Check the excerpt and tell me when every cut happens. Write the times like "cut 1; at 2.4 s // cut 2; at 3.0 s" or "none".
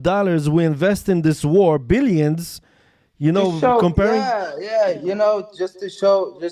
none